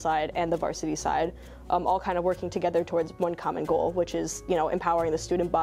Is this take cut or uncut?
uncut